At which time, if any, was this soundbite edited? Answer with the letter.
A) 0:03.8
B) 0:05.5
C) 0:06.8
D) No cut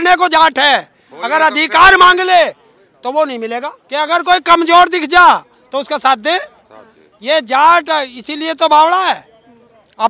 A